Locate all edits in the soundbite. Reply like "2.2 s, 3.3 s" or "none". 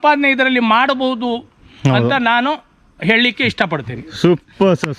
none